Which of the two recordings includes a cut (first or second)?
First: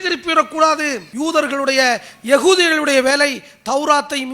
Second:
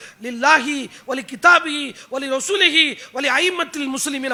first